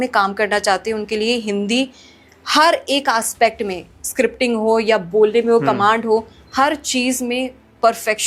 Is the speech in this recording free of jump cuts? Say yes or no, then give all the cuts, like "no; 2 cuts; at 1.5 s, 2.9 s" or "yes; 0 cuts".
yes; 0 cuts